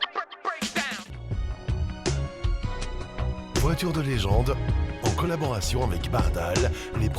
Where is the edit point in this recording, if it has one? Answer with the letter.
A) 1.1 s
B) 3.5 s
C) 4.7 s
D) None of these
A